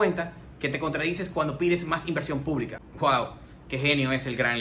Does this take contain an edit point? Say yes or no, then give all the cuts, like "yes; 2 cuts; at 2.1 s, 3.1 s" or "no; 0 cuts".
yes; 1 cut; at 2.8 s